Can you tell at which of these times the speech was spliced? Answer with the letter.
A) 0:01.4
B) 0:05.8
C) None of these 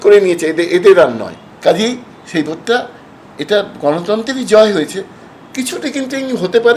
A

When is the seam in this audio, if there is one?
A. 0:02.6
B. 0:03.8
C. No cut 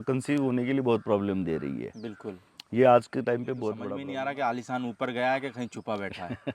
B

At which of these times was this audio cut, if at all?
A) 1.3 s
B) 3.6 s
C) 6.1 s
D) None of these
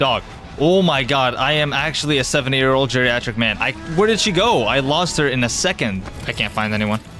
C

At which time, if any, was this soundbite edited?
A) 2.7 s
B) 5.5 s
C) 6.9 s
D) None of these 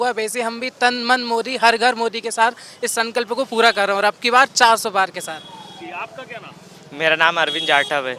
D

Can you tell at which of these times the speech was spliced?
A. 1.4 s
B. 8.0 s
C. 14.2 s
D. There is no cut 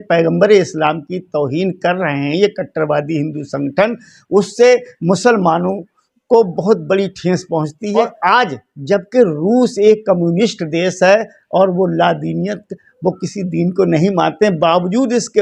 B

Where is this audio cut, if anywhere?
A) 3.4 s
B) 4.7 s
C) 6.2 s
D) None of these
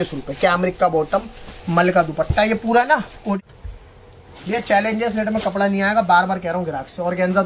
A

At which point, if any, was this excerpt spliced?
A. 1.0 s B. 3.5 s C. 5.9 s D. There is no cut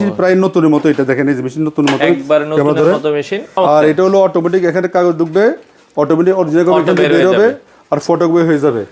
B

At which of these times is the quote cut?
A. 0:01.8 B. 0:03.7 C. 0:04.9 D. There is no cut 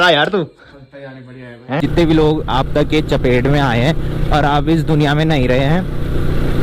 A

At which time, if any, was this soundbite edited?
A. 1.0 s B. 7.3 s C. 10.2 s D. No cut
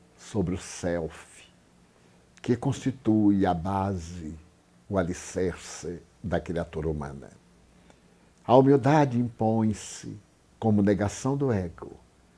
D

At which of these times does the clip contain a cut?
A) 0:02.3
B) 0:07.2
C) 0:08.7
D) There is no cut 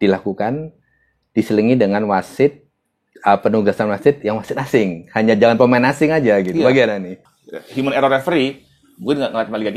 B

